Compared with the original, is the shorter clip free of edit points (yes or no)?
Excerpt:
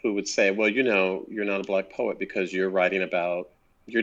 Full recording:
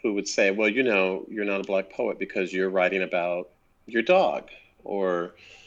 yes